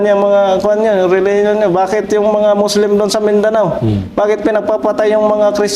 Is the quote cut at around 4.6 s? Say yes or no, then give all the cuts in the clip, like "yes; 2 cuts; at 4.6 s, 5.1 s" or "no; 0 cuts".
no; 0 cuts